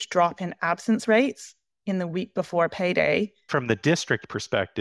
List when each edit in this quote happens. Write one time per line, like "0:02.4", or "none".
0:03.5

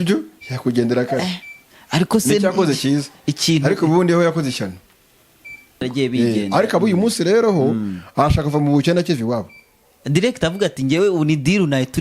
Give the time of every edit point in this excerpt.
0:05.8

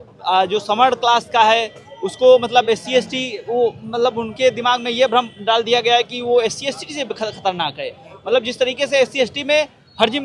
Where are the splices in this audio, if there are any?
none

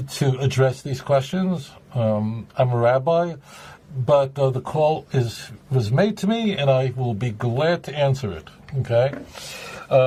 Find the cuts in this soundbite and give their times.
none

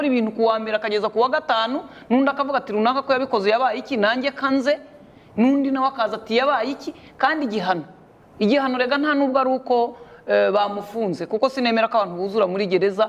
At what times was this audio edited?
none

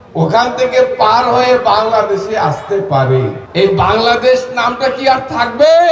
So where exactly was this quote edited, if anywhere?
0:03.4

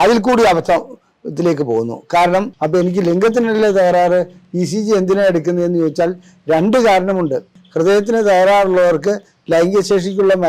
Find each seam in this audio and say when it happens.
0:02.6
0:07.6

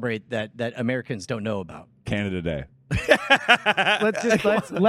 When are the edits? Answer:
0:04.0

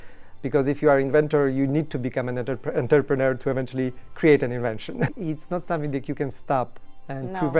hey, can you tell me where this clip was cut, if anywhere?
0:05.1

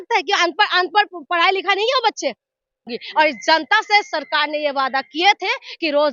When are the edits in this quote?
0:02.8

